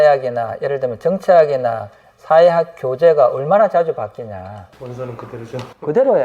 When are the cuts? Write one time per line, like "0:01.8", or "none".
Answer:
0:04.7